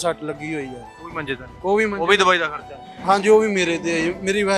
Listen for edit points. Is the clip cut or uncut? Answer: uncut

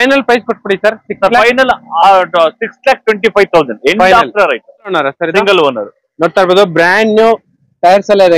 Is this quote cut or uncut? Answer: cut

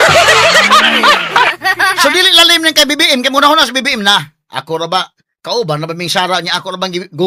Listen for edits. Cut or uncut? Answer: uncut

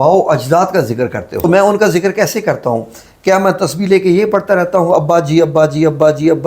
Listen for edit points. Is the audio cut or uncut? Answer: cut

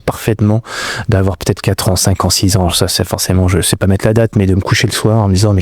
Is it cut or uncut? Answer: uncut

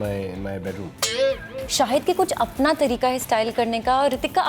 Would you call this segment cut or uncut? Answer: cut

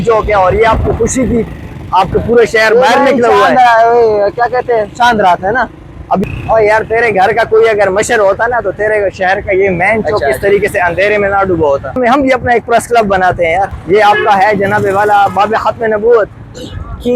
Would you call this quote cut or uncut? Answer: cut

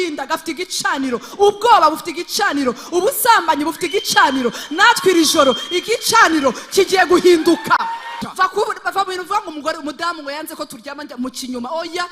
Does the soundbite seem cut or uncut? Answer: cut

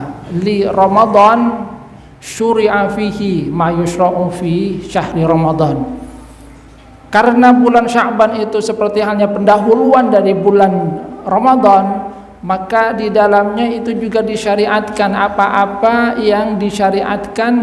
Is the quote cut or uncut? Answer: uncut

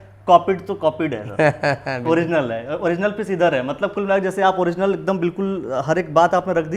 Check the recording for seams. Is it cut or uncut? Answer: uncut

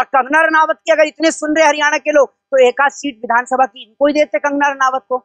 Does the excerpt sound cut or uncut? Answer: uncut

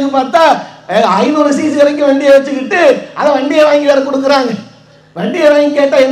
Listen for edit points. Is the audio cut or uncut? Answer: uncut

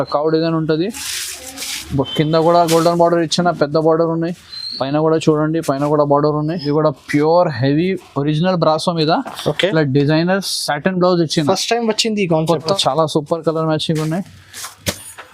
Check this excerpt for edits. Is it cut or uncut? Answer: cut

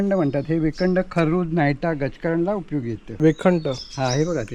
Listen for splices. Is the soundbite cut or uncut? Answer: uncut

